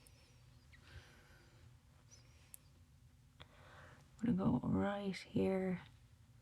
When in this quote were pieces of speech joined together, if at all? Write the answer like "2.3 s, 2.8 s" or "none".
2.2 s